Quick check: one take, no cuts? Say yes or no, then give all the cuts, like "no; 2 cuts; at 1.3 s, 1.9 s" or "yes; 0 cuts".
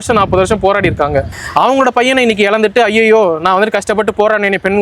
no; 1 cut; at 1.4 s